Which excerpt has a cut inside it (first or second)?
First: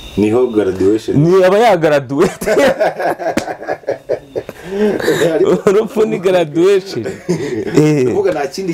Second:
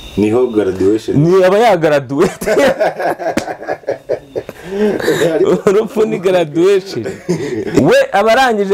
second